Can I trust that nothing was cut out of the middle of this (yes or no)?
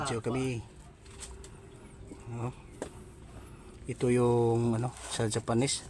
yes